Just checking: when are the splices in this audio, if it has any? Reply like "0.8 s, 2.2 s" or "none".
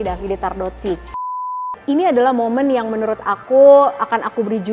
1.4 s